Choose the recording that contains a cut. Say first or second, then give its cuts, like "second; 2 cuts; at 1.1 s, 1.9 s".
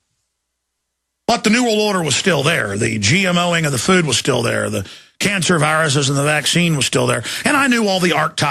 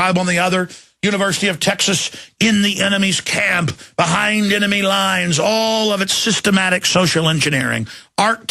second; 1 cut; at 5.9 s